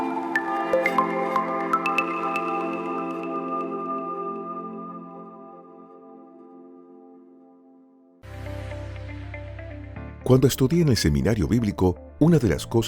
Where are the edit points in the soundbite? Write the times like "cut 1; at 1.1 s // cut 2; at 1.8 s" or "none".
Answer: cut 1; at 8.1 s